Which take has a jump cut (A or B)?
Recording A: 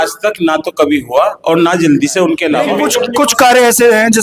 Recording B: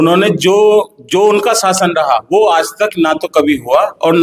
A